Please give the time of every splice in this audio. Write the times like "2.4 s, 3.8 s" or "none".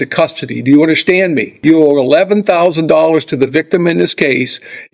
1.5 s